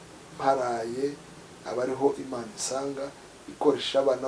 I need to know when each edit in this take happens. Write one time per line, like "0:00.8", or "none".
none